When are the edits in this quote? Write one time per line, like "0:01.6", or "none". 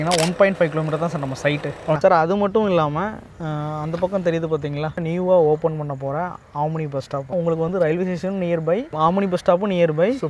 0:02.0
0:05.0
0:07.3